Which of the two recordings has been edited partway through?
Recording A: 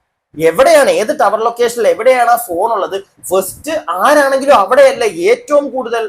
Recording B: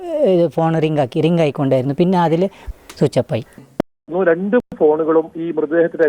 B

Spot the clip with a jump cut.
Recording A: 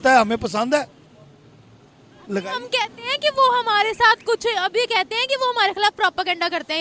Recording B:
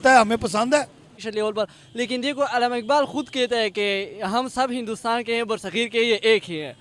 B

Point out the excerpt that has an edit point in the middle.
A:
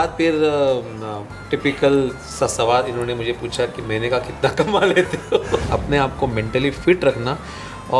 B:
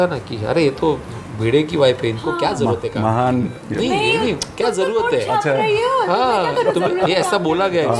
A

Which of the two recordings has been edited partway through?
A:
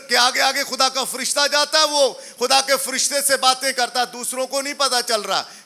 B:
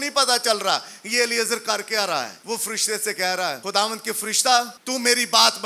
B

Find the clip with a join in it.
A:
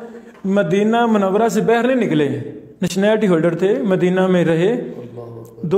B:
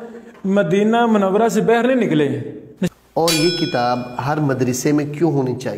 B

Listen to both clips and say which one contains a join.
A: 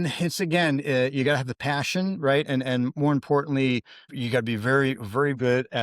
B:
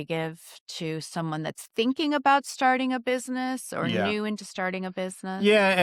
A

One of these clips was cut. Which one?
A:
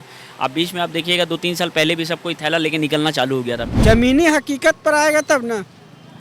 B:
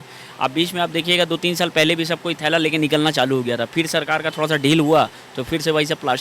A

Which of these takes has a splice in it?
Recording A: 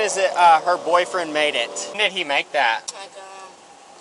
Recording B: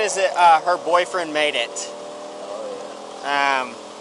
A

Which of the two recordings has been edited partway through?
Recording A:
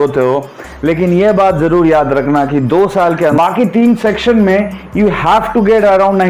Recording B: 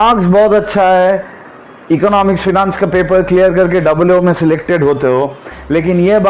A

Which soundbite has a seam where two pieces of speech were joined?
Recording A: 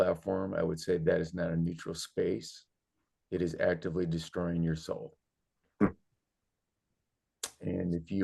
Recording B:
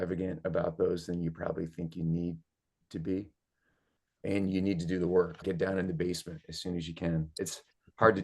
B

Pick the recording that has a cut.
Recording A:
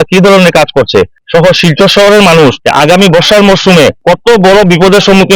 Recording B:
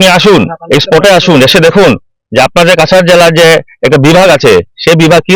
A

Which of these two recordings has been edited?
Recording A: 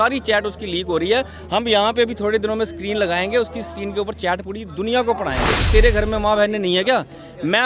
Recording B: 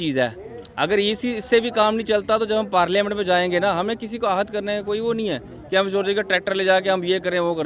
A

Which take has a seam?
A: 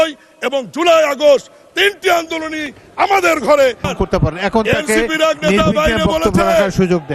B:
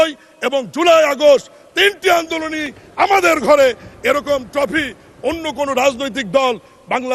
A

